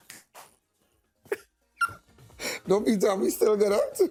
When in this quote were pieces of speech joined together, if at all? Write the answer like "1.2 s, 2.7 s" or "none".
none